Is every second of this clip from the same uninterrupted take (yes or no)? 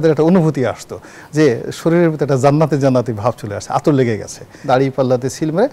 no